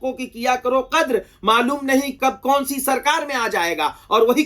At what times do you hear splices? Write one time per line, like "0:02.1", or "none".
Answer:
0:02.2